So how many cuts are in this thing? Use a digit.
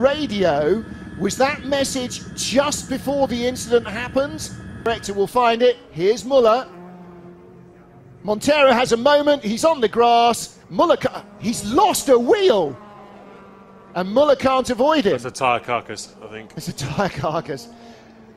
0